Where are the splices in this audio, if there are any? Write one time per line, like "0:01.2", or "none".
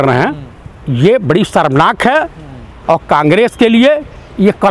none